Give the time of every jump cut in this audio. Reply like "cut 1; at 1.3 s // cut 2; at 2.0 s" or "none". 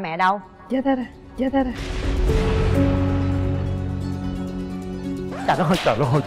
none